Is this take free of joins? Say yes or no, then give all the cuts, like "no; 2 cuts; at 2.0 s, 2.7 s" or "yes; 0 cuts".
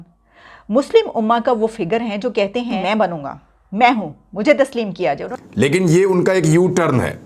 no; 2 cuts; at 2.8 s, 5.3 s